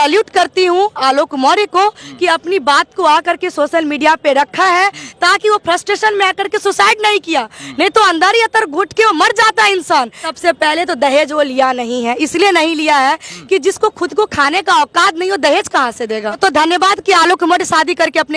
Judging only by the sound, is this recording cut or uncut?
cut